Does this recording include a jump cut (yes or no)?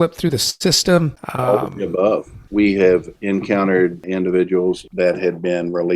yes